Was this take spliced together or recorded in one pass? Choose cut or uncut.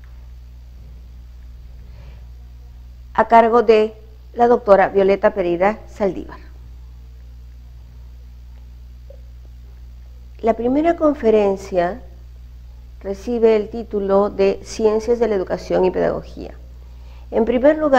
uncut